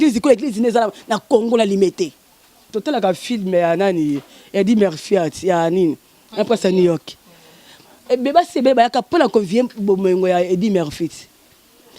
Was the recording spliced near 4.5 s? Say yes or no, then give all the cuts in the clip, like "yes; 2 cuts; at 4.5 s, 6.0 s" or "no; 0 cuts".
no; 1 cut; at 2.6 s